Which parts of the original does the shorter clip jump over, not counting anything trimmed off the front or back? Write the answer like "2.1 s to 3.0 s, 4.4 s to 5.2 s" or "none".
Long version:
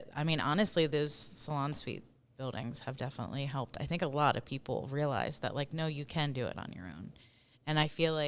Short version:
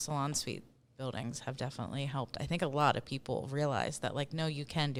none